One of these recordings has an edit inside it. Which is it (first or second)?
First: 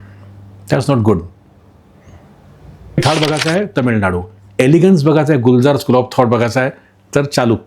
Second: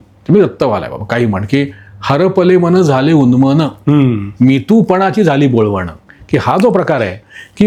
first